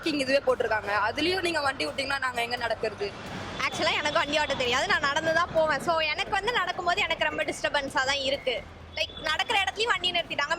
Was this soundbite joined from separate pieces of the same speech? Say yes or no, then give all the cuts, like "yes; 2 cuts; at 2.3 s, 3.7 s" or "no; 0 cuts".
yes; 1 cut; at 3.2 s